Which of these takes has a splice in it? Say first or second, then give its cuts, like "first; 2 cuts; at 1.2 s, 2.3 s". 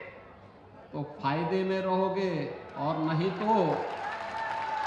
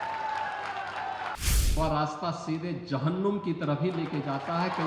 second; 1 cut; at 1.4 s